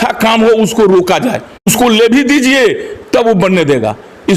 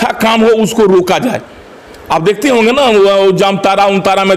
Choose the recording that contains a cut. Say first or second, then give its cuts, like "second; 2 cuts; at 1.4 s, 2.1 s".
first; 1 cut; at 1.7 s